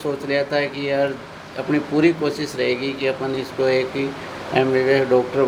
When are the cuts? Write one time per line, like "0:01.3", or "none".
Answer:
none